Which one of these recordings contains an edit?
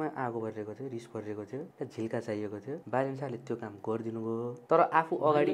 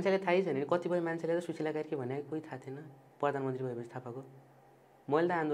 first; 3 cuts; at 1.7 s, 2.8 s, 4.6 s

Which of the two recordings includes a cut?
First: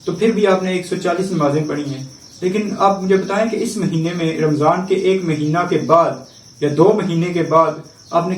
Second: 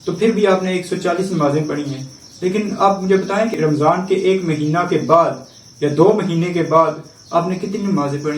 second; 1 cut; at 3.5 s

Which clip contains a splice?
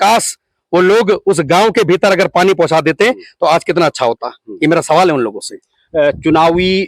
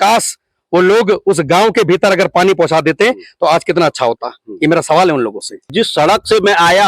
second; 1 cut; at 5.7 s

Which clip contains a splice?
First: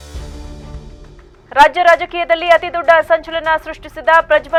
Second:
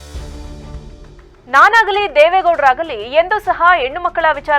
second; 1 cut; at 1.0 s

